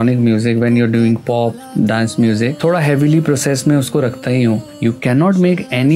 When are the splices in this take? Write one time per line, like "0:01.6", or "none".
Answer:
0:02.5
0:04.7